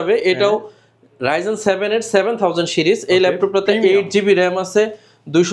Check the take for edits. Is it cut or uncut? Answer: uncut